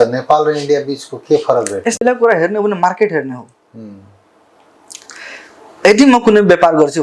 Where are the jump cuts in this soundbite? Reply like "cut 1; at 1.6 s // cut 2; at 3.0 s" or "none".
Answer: cut 1; at 2.0 s